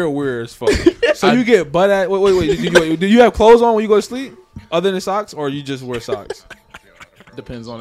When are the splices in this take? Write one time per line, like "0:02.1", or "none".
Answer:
none